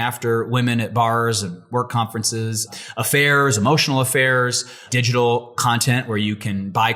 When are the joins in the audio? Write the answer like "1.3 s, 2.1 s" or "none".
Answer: 2.7 s, 4.8 s